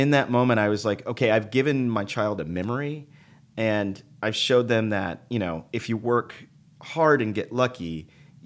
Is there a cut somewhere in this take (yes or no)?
no